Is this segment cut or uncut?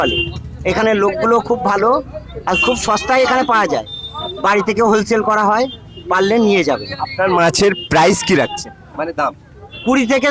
uncut